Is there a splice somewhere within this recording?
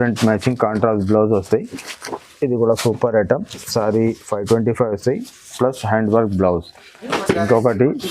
yes; 1 cut; at 7.1 s

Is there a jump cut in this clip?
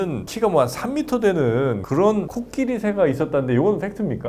yes; 1 cut; at 1.8 s

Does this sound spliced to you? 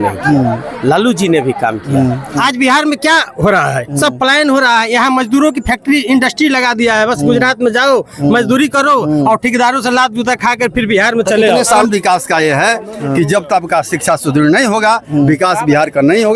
yes; 2 cuts; at 2.4 s, 11.7 s

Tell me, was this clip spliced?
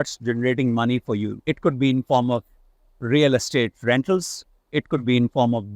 yes; 1 cut; at 1.3 s

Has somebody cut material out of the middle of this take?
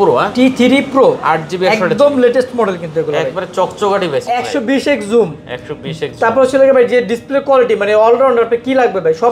yes; 1 cut; at 4.3 s

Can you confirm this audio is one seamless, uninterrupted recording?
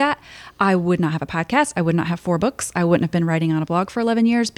yes; 0 cuts

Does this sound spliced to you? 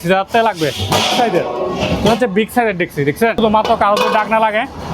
yes; 1 cut; at 3.4 s

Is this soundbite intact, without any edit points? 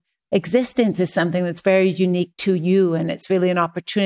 yes; 0 cuts

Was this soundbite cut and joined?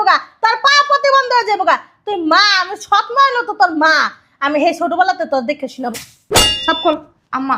yes; 1 cut; at 6.5 s

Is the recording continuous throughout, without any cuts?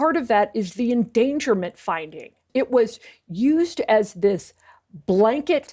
no; 1 cut; at 2.4 s

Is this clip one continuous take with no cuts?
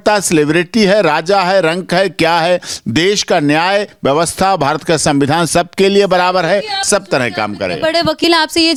yes; 0 cuts

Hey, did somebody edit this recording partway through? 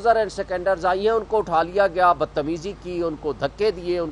no; 0 cuts

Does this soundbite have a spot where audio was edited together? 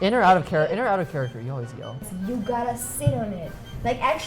yes; 1 cut; at 2.1 s

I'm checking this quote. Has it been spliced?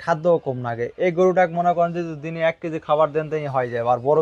no; 0 cuts

